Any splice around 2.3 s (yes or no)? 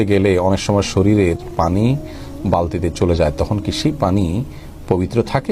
no